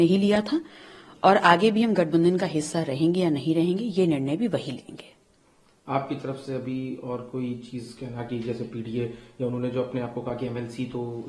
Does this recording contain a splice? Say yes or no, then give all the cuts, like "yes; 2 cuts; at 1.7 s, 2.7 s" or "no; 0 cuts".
no; 0 cuts